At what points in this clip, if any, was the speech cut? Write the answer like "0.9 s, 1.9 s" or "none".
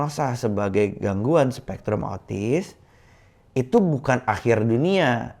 none